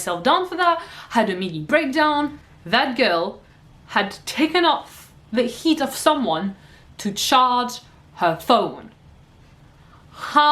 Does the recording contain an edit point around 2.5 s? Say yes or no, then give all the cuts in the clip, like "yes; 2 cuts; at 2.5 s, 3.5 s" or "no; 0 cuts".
yes; 1 cut; at 2.5 s